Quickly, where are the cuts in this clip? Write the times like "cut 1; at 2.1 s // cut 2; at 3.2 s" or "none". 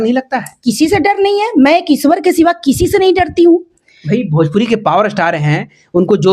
none